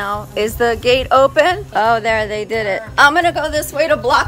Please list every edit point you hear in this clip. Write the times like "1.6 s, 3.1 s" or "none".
2.9 s